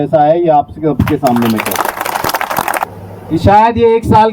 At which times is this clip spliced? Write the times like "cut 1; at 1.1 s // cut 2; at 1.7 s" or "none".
cut 1; at 2.8 s